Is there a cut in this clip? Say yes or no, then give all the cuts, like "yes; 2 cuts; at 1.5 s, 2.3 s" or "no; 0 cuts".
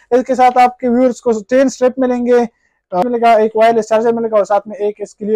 yes; 1 cut; at 3.0 s